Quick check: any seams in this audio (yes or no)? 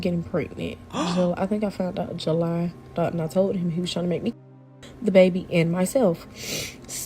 yes